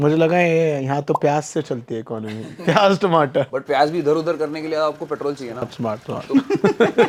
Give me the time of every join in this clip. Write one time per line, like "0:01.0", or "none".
none